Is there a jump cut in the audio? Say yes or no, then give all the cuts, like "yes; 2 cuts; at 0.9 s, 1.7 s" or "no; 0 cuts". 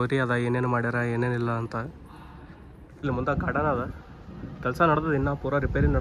yes; 1 cut; at 3.0 s